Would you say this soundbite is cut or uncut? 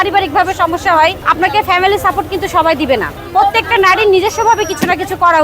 cut